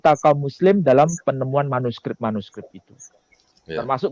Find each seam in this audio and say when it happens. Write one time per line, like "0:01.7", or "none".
none